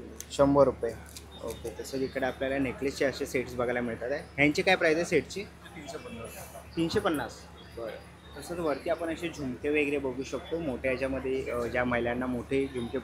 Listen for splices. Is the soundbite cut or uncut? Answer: uncut